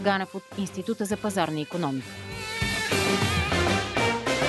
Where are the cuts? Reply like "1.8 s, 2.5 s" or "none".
2.5 s